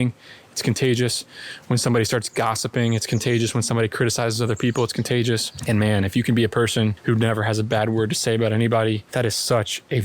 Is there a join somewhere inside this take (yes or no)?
yes